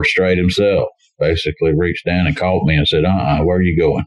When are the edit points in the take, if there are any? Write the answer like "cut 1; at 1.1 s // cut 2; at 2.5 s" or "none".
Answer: cut 1; at 1.1 s